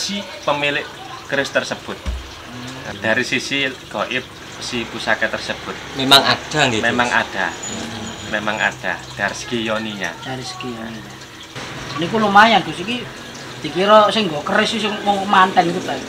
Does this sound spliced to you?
yes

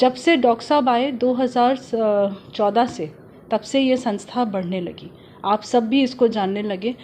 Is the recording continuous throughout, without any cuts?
yes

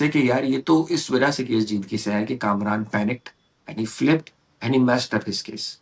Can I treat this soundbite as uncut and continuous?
yes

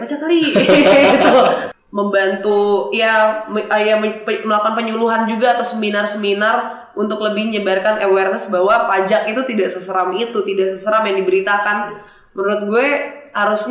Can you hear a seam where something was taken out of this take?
yes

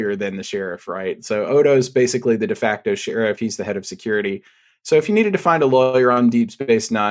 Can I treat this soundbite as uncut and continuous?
yes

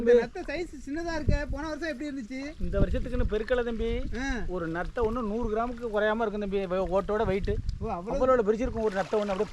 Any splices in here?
no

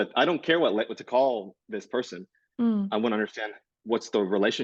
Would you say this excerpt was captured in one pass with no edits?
yes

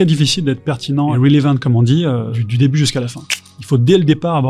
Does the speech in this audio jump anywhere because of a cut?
yes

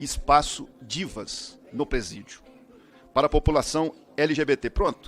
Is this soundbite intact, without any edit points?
yes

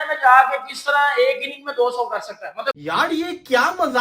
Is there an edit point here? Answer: yes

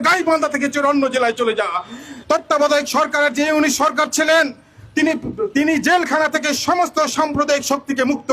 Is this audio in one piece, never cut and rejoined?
no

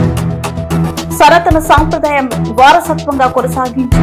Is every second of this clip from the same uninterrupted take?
yes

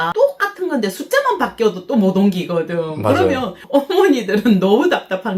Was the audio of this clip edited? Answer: no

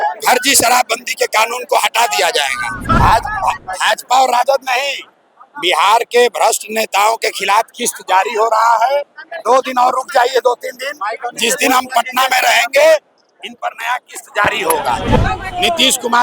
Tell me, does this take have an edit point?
yes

